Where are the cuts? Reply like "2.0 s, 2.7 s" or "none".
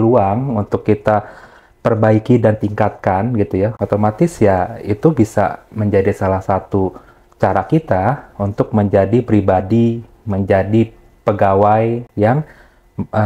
none